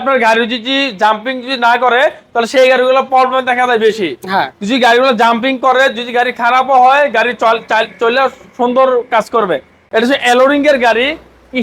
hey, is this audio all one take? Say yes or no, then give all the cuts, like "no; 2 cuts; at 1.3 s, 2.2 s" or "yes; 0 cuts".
no; 1 cut; at 9.8 s